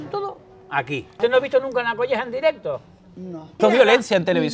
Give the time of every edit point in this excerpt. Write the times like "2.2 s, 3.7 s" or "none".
1.1 s, 3.6 s